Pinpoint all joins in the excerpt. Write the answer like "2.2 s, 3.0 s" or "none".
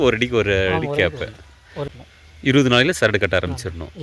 1.9 s